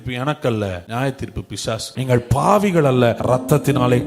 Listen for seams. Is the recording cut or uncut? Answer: cut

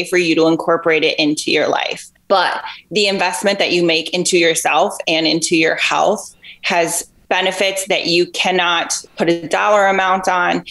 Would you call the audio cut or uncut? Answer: uncut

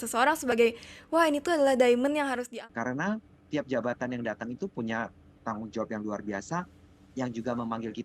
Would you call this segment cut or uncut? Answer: cut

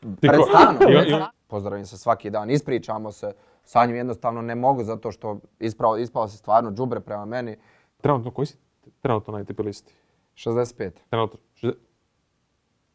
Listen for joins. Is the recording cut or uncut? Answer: cut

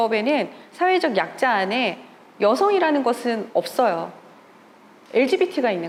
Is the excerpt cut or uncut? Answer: uncut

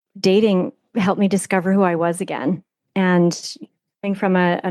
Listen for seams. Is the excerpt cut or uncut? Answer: uncut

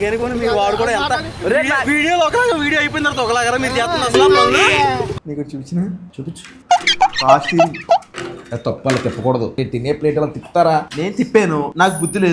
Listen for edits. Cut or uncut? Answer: cut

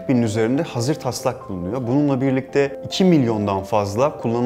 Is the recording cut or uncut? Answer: cut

